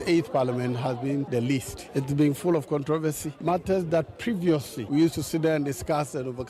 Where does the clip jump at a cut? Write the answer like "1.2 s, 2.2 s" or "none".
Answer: 1.5 s, 4.8 s